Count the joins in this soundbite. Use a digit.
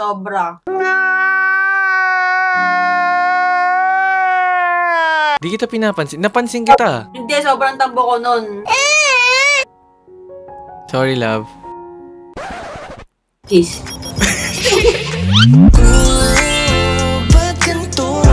1